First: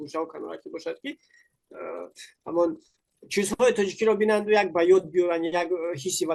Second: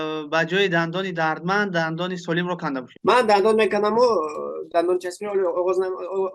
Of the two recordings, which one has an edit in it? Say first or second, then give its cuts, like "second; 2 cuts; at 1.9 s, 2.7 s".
second; 1 cut; at 2.9 s